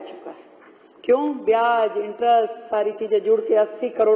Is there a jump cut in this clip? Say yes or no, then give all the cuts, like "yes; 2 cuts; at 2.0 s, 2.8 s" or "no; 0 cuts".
no; 0 cuts